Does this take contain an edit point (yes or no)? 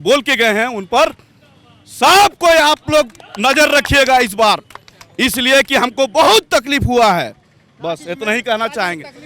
no